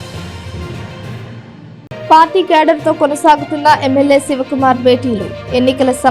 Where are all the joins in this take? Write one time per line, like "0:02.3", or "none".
0:01.8